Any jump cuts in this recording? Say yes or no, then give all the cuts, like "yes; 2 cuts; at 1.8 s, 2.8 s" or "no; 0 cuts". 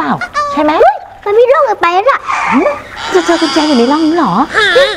yes; 1 cut; at 3.1 s